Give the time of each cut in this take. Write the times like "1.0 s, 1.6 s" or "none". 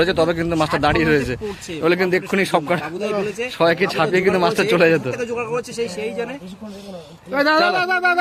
none